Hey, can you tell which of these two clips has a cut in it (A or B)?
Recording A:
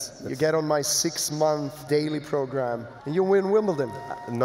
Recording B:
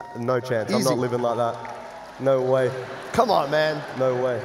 A